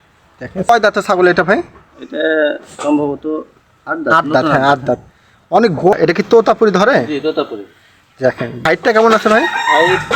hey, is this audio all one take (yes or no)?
no